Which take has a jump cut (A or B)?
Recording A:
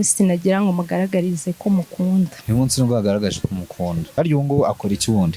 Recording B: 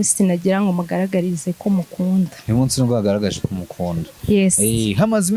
A